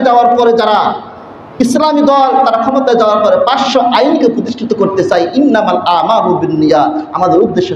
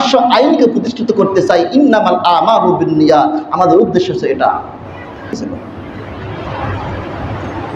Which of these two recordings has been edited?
second; 1 cut; at 5.3 s

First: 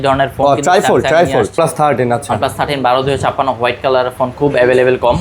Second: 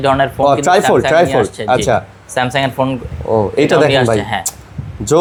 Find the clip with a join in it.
first; 1 cut; at 1.5 s

